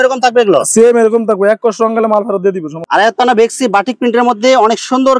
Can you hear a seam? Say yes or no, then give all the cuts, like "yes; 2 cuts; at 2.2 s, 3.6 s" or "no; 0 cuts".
yes; 1 cut; at 2.8 s